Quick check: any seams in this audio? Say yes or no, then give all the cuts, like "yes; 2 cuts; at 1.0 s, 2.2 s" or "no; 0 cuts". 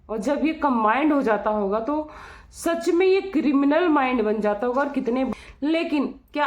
yes; 1 cut; at 5.3 s